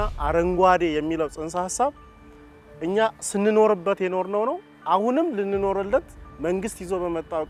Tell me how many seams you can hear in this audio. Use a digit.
0